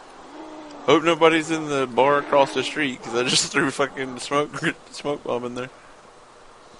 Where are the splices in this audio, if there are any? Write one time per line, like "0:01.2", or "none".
0:05.5

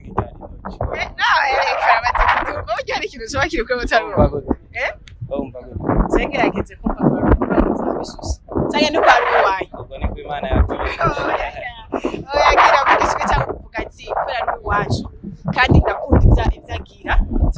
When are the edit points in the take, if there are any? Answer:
none

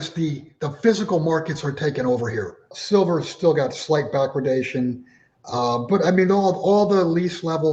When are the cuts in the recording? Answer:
0:02.7

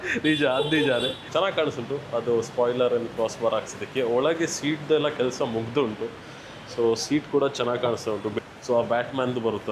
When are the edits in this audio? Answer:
0:01.2
0:08.3

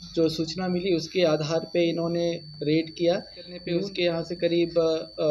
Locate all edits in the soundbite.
0:03.6

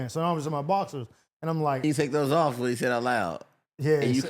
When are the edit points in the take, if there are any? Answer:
0:01.8

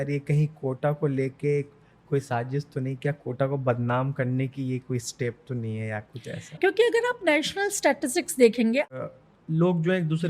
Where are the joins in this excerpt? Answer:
0:08.9

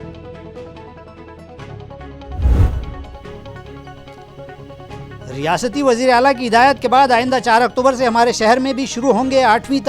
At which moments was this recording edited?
0:03.1

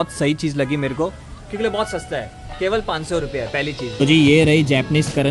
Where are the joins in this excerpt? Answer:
0:03.9

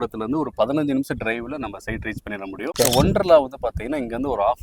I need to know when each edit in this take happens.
0:02.7

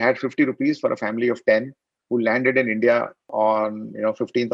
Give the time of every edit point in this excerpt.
0:03.2

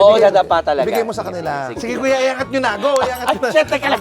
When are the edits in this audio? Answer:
0:01.8

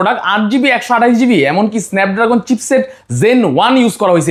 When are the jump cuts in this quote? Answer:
none

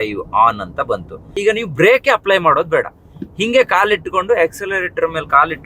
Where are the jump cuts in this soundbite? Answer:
0:01.4

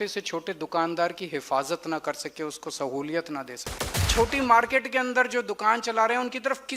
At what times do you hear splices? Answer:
0:04.1

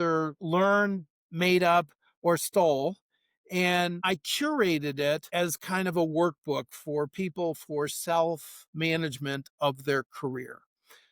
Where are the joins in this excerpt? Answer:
0:04.0

